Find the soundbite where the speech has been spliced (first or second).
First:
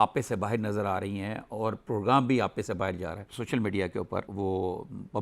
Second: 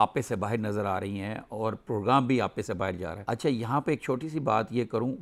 first